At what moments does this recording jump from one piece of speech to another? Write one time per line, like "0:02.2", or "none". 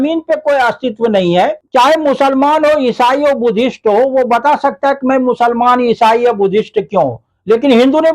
0:01.6